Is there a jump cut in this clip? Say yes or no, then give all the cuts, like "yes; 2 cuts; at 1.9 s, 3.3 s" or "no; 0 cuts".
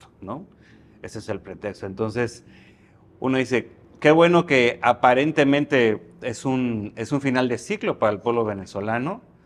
no; 0 cuts